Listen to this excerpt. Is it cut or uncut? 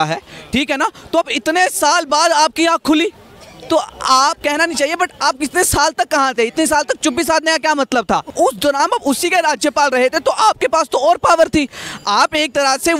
cut